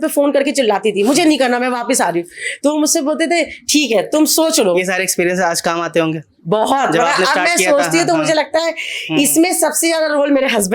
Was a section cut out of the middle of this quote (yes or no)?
no